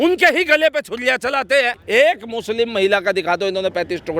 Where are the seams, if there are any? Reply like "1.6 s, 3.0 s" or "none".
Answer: 1.8 s